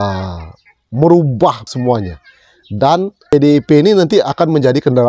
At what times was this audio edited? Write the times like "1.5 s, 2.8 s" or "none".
1.6 s, 3.3 s